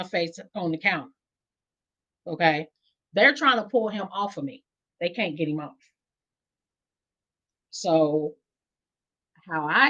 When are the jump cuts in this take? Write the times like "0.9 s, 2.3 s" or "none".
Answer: none